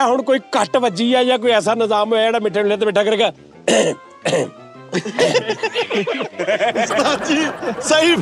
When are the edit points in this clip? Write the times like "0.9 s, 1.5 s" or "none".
none